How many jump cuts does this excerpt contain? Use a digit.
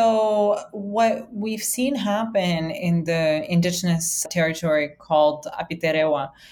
1